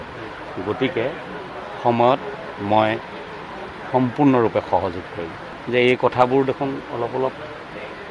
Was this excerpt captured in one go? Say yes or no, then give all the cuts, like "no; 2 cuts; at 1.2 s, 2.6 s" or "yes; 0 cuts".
no; 1 cut; at 5.5 s